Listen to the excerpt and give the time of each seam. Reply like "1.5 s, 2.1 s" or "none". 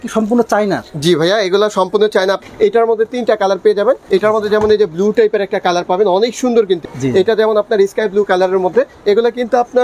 2.4 s, 4.0 s, 6.8 s